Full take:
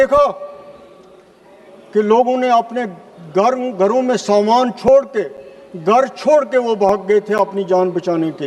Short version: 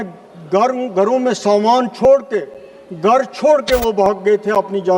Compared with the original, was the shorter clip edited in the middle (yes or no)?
no